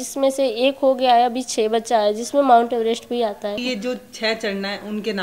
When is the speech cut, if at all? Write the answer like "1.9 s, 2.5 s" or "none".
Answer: 3.6 s